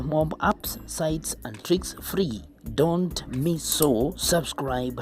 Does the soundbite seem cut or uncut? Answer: cut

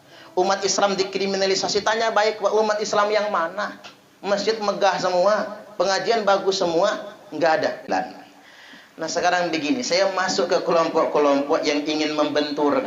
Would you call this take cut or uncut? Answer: cut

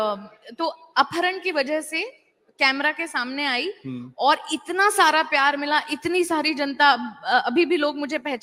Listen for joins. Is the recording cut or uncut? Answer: uncut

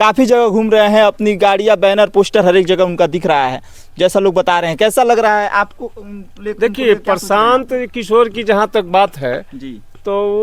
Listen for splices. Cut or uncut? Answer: uncut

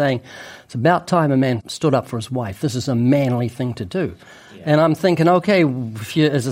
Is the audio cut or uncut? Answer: cut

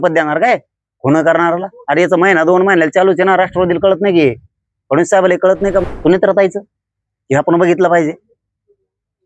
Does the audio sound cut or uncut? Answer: cut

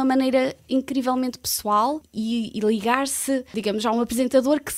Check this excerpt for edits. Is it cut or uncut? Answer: cut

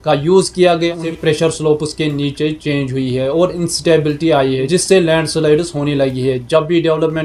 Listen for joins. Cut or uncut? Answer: cut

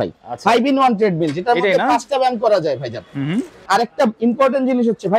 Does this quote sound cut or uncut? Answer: cut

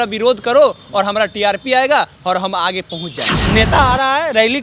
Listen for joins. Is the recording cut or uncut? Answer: cut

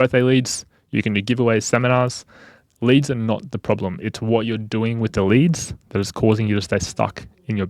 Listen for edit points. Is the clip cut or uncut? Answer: uncut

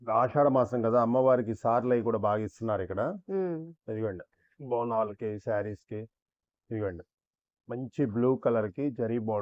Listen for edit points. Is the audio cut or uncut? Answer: uncut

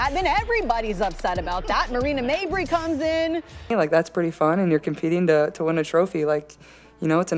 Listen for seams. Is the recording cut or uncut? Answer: uncut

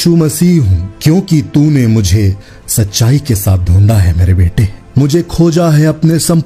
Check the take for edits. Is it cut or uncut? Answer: uncut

